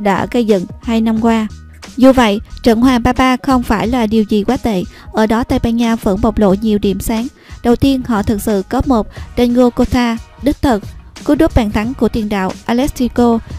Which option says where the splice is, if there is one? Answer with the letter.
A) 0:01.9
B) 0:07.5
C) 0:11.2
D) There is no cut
C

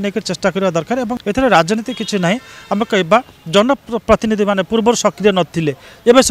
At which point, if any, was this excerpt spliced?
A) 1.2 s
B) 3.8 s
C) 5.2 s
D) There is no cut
A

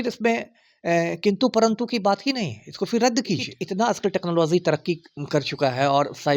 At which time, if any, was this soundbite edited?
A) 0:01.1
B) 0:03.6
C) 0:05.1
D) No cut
B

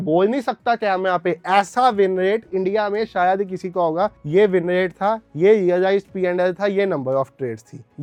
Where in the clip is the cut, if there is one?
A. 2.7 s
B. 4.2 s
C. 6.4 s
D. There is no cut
D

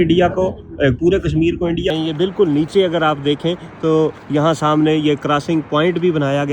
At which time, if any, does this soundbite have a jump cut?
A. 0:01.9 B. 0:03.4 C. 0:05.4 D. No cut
A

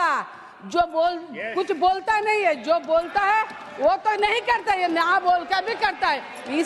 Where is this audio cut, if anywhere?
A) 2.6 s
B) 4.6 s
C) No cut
C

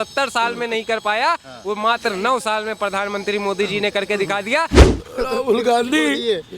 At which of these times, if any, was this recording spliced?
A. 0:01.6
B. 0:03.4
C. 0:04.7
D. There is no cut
C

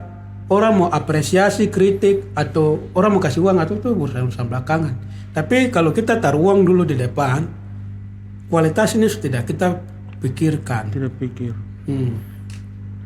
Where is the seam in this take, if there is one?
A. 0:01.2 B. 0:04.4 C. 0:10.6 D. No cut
D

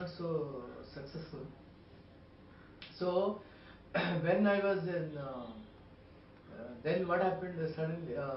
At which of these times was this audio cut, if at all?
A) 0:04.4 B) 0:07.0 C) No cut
C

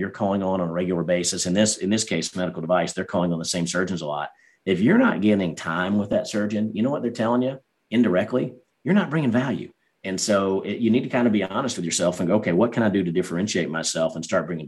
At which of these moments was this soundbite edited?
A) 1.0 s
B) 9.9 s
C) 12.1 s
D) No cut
D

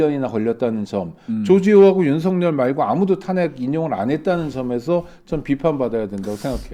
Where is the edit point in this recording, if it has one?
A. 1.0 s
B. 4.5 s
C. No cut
C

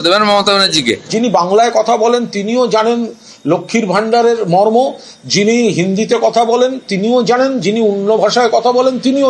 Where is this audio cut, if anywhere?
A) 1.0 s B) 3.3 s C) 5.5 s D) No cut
A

